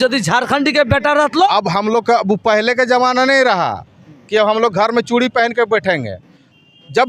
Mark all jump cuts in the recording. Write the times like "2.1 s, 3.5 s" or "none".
1.2 s